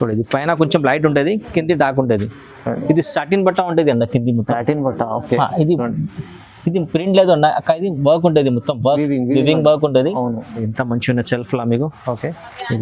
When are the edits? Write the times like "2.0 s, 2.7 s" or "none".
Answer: 10.6 s